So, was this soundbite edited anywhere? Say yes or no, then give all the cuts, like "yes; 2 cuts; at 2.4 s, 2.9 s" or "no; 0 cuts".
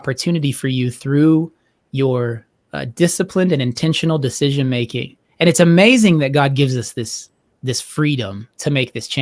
no; 0 cuts